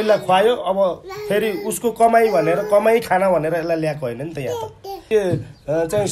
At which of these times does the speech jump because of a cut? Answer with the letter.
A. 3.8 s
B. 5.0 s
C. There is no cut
B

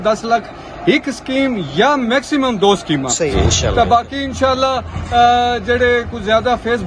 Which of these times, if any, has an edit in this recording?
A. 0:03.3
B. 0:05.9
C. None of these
A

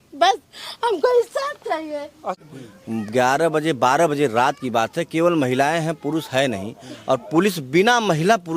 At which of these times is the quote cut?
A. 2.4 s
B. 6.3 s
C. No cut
A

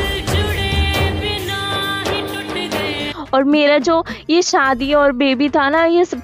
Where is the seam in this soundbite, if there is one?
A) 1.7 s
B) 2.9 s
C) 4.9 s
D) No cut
D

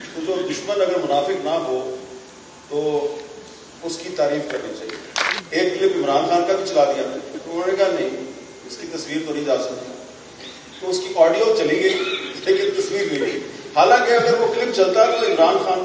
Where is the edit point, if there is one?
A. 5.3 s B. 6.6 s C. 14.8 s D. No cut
A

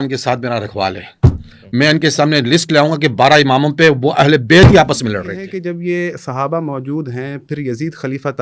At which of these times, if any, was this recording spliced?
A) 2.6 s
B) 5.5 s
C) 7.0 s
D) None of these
B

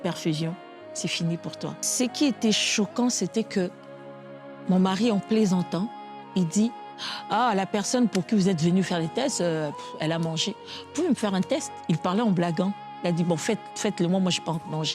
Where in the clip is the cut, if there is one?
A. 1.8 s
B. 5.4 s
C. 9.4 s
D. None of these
A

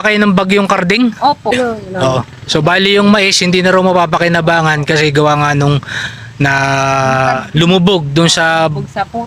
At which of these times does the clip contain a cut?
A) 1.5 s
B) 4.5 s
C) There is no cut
A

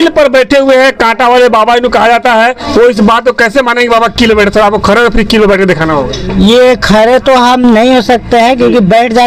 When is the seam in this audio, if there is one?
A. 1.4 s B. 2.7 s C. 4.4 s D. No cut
B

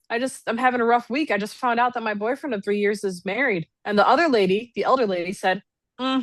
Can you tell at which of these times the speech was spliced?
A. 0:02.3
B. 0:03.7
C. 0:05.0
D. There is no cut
B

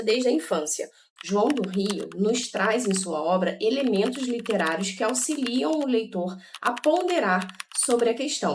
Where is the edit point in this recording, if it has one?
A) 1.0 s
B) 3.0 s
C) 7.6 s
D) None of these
A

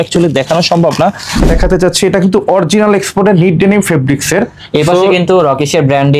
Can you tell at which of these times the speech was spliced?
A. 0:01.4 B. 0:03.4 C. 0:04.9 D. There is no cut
A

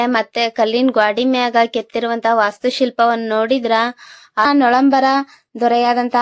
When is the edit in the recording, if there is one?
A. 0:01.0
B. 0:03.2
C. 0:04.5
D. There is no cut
C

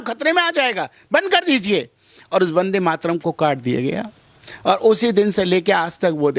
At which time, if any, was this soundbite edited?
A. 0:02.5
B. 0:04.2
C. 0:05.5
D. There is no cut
D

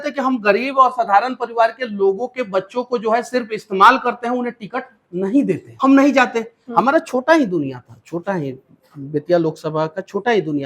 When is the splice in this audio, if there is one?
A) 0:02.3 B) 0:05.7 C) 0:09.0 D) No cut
B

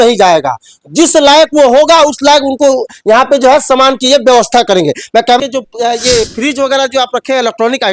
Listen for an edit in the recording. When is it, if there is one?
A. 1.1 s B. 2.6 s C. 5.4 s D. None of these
C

